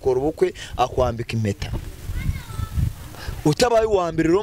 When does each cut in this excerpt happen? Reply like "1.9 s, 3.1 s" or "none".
none